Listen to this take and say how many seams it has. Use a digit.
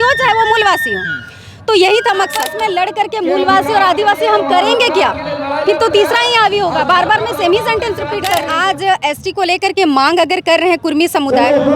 2